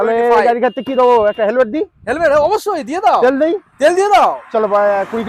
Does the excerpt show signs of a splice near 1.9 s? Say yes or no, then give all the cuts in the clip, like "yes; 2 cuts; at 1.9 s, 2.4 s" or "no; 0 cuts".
no; 0 cuts